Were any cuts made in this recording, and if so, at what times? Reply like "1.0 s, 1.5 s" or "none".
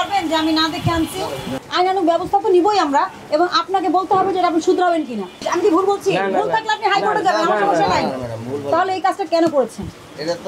1.6 s, 5.5 s